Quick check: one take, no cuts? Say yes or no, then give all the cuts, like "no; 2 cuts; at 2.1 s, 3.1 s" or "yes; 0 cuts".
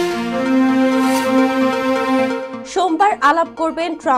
yes; 0 cuts